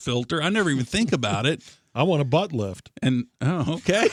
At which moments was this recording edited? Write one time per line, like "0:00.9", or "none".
none